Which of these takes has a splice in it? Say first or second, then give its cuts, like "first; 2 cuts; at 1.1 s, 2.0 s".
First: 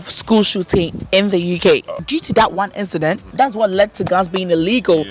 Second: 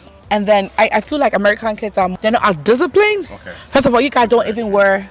first; 2 cuts; at 2.0 s, 3.3 s